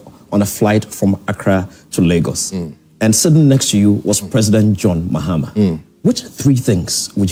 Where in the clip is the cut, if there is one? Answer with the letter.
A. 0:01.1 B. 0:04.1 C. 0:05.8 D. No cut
D